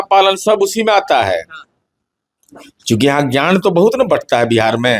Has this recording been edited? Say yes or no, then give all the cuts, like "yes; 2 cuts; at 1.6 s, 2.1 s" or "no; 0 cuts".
no; 0 cuts